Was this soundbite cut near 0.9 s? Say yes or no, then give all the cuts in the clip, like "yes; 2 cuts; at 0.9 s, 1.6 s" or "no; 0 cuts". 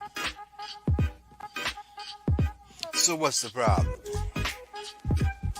yes; 1 cut; at 0.9 s